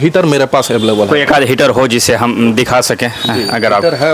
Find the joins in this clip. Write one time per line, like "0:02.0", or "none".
none

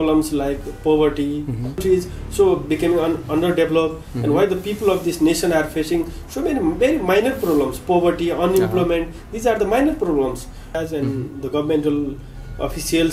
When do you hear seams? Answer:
0:01.8
0:10.8

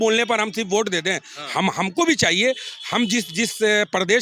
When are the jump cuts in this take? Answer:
none

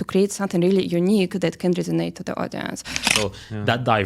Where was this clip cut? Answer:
0:03.1

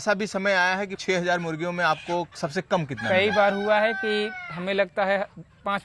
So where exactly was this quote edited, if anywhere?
0:00.9

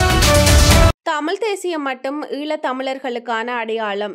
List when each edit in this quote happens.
0:00.9

